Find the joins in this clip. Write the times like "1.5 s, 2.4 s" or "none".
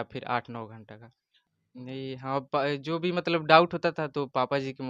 1.3 s